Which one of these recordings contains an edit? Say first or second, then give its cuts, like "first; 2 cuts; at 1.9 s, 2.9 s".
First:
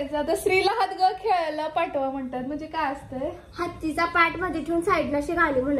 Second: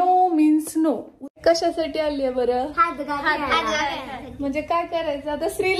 second; 1 cut; at 1.3 s